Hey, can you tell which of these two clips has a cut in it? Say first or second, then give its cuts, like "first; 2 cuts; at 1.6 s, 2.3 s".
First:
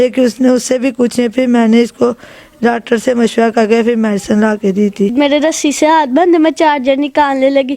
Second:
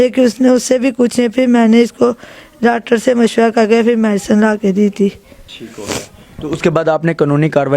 first; 1 cut; at 5.1 s